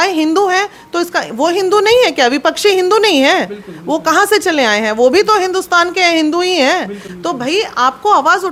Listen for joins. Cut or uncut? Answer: uncut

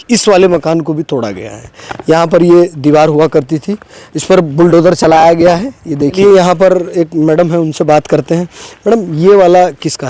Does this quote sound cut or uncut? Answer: uncut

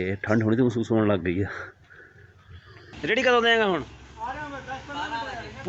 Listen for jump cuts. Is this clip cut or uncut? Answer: cut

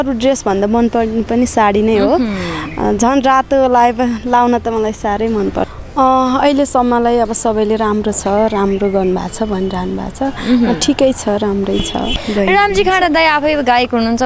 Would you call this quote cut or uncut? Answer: cut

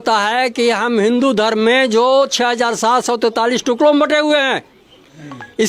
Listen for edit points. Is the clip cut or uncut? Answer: uncut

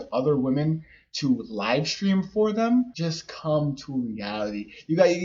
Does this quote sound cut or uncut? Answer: cut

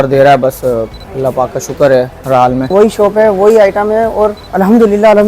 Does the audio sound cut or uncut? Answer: cut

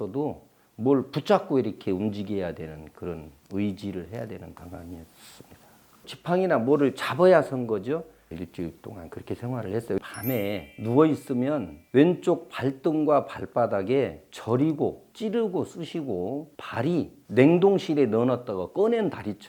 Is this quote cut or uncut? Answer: uncut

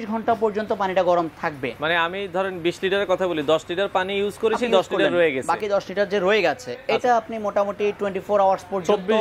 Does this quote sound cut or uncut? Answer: uncut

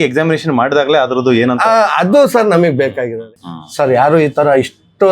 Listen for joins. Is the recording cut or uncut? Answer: cut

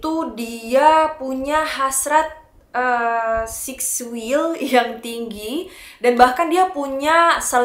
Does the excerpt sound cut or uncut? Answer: uncut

